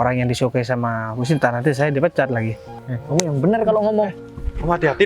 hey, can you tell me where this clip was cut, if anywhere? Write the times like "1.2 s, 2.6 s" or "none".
2.7 s